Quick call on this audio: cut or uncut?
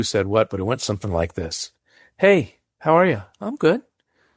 uncut